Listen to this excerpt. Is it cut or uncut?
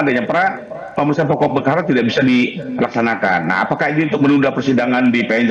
uncut